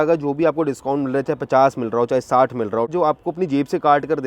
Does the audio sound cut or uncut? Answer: cut